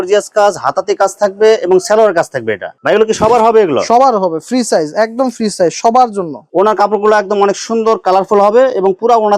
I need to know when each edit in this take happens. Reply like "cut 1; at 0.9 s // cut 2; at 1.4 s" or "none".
none